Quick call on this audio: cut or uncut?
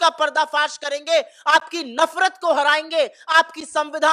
uncut